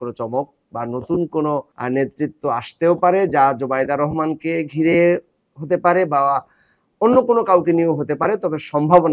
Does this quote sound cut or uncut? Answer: cut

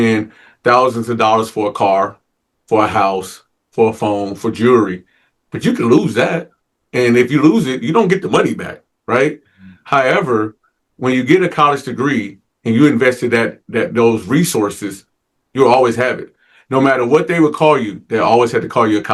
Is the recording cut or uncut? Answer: uncut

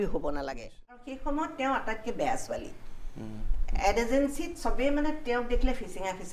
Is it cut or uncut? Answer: cut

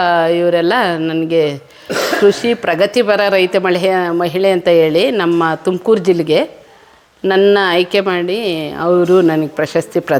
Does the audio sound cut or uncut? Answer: uncut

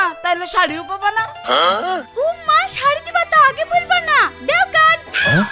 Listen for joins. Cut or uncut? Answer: uncut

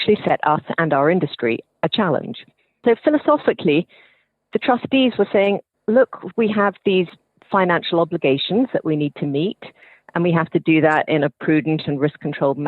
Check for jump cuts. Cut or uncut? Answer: uncut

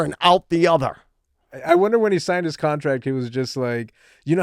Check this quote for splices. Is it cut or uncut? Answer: uncut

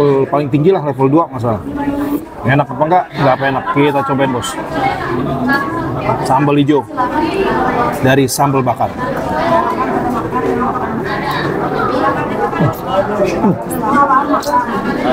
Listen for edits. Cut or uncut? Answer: uncut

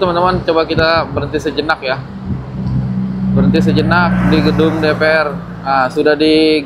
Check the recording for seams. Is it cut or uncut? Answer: uncut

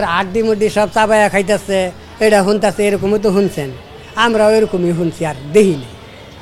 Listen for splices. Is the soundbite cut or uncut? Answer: uncut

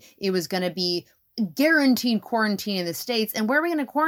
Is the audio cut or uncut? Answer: cut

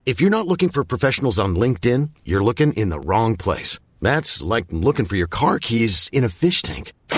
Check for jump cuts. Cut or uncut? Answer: uncut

